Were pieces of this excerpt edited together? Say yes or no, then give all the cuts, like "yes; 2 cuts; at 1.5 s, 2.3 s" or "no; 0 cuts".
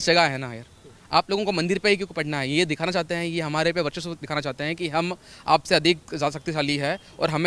no; 0 cuts